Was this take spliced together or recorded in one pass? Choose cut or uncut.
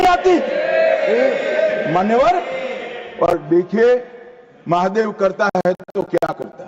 uncut